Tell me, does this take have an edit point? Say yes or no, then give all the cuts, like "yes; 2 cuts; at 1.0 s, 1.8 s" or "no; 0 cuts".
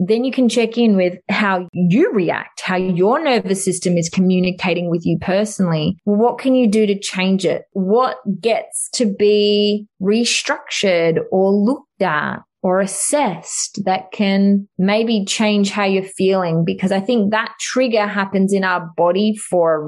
yes; 5 cuts; at 1.7 s, 6.0 s, 7.7 s, 9.9 s, 14.7 s